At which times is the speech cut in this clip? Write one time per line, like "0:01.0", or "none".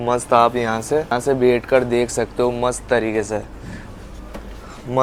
none